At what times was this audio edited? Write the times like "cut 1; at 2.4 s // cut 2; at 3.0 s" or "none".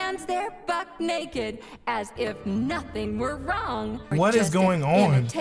cut 1; at 4.1 s